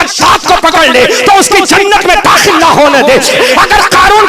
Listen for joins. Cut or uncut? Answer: cut